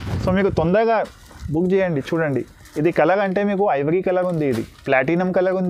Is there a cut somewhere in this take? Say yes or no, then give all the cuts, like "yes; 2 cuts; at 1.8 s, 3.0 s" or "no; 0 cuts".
no; 0 cuts